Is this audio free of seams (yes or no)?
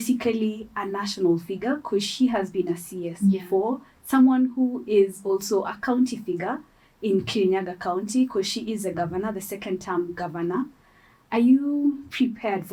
yes